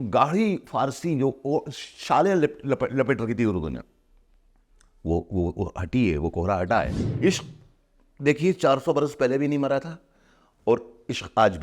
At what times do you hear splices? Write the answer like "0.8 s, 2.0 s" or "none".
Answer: 7.0 s